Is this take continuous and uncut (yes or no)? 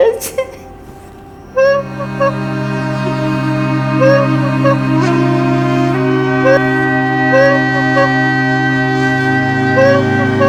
yes